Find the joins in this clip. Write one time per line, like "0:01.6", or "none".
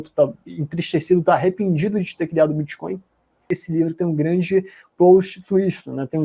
0:03.4